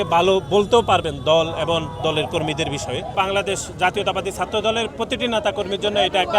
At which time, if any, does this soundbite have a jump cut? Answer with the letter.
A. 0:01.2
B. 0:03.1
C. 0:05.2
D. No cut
B